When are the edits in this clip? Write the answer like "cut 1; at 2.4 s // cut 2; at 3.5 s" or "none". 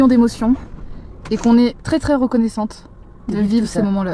none